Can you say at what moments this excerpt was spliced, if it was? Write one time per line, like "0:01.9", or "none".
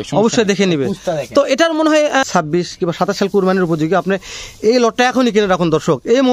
0:02.3